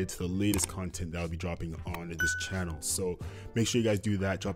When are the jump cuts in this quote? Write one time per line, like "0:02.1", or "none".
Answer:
none